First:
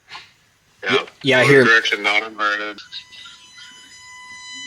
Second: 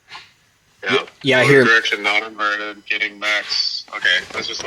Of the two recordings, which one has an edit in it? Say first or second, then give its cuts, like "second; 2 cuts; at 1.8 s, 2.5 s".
first; 1 cut; at 2.8 s